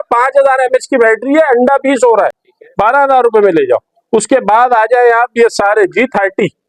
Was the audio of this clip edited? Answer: no; 0 cuts

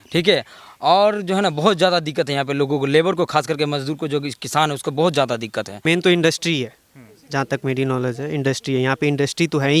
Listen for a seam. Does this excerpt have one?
yes; 1 cut; at 5.8 s

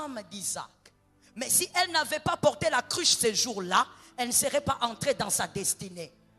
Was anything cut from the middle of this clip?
no; 0 cuts

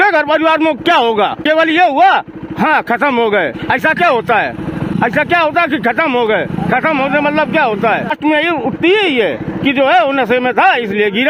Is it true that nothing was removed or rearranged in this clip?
no; 3 cuts; at 1.4 s, 5.0 s, 8.1 s

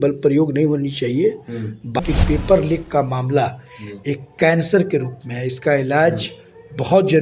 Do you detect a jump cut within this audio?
yes; 1 cut; at 2.0 s

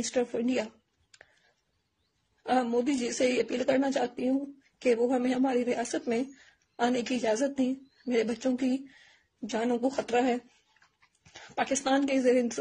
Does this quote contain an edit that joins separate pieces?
no; 0 cuts

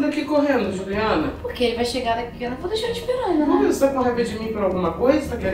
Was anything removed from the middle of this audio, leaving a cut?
no; 0 cuts

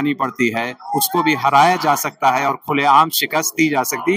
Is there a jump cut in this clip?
no; 0 cuts

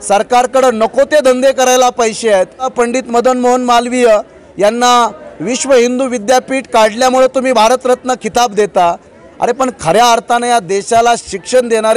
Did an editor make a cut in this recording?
yes; 1 cut; at 2.7 s

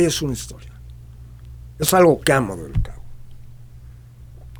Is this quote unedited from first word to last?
yes; 0 cuts

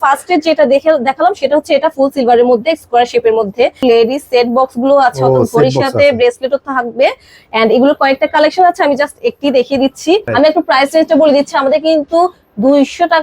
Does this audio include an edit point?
yes; 2 cuts; at 3.8 s, 10.3 s

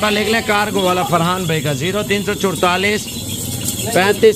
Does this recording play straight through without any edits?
yes; 0 cuts

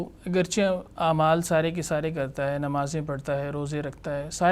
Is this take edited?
no; 0 cuts

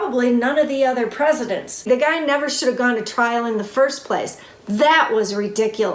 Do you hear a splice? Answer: yes; 1 cut; at 1.8 s

